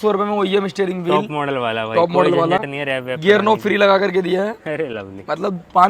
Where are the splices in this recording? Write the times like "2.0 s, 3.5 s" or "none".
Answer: none